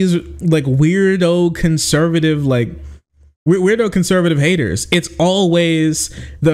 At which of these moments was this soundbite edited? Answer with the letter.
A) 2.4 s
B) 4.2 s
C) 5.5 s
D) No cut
D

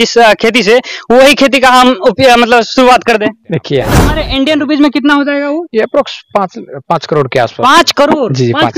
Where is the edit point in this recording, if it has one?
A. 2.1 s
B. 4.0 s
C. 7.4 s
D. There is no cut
B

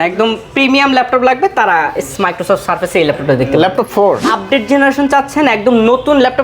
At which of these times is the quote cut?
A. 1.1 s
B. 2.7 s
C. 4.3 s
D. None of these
C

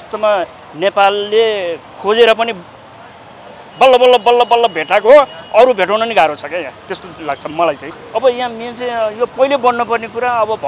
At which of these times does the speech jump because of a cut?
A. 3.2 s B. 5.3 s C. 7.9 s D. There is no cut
C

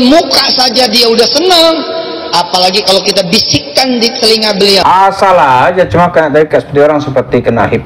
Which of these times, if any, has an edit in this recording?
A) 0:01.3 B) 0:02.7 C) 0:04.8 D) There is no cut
C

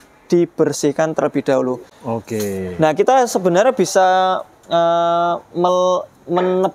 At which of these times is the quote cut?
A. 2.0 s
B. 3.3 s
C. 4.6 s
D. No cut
D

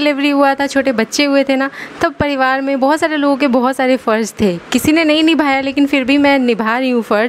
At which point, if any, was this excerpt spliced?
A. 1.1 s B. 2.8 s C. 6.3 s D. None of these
D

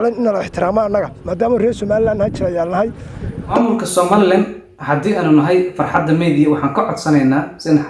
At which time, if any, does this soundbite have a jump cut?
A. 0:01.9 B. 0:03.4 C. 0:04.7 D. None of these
B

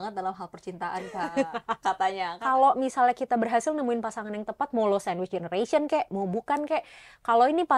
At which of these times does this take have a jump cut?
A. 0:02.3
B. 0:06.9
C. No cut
A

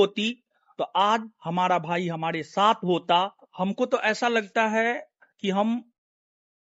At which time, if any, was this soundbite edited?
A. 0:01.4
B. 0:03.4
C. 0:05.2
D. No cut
B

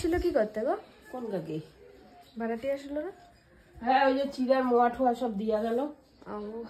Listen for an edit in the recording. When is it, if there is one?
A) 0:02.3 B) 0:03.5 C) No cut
C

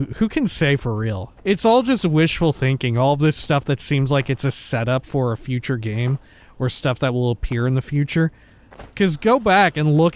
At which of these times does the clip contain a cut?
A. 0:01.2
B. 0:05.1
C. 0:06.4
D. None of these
A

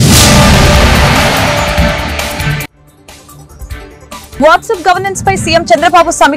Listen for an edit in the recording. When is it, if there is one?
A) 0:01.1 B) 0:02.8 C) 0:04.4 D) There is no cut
C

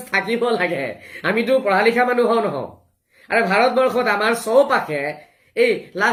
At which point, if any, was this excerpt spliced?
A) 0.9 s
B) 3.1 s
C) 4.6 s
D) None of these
D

